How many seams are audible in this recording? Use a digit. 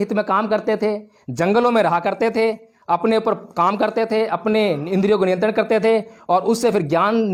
0